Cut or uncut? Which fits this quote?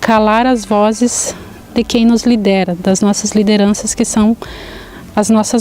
uncut